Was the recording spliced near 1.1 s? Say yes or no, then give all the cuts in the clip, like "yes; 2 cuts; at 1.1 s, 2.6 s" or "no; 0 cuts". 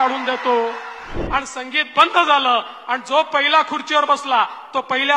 yes; 1 cut; at 1.1 s